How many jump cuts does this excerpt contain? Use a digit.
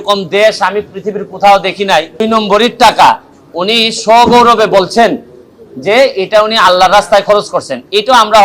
1